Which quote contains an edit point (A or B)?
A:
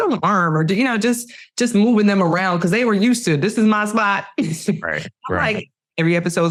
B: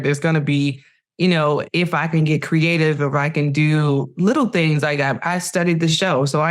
B